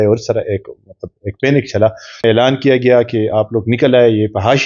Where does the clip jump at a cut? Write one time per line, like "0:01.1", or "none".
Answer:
0:02.2